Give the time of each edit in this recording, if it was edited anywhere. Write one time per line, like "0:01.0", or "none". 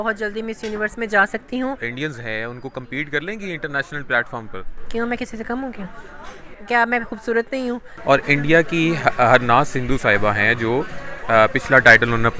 0:01.9
0:07.9